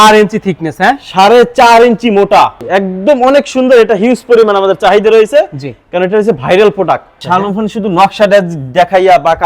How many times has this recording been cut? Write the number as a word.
two